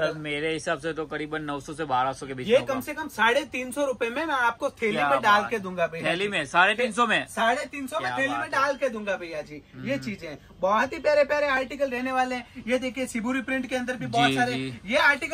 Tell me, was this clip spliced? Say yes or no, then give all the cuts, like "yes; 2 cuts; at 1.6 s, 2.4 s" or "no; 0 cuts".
no; 0 cuts